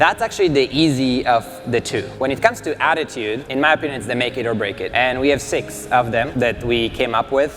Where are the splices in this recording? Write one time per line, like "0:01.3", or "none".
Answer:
0:02.1
0:03.4
0:04.9
0:06.3